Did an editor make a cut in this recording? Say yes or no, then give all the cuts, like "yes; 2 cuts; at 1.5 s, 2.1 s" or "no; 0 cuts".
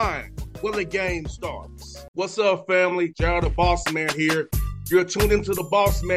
no; 0 cuts